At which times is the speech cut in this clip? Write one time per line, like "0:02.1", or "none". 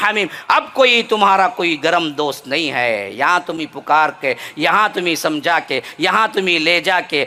none

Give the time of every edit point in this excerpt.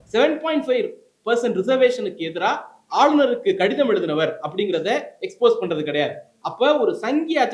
none

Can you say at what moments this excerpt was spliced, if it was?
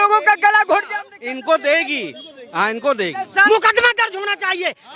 0:03.4

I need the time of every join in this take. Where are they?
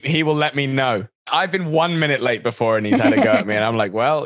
0:01.2

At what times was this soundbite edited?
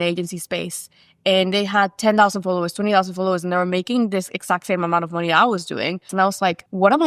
0:06.1

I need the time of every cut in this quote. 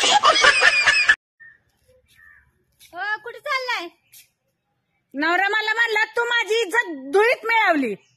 0:01.1

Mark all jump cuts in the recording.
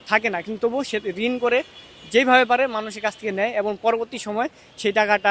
none

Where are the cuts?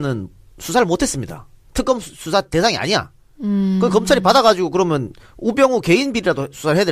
0:04.8

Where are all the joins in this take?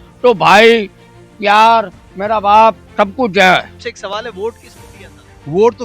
0:03.7

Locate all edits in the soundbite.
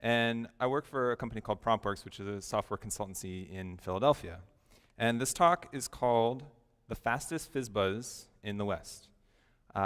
0:01.1

